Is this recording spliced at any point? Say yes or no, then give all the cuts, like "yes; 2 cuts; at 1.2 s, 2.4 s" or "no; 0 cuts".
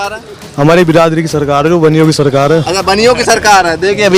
no; 0 cuts